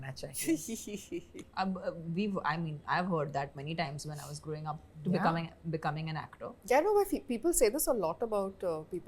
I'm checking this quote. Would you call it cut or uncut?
uncut